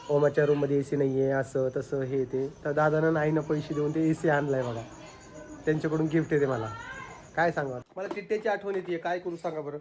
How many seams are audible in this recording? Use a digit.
1